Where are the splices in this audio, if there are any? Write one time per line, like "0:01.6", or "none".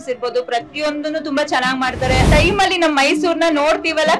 0:02.3